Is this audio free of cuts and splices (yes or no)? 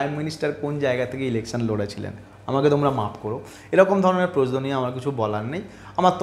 yes